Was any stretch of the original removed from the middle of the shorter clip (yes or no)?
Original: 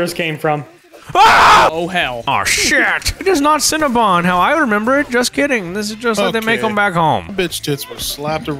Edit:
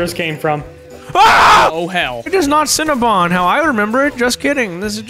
yes